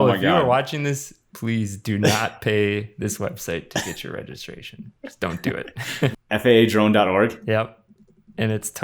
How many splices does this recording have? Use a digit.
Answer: 1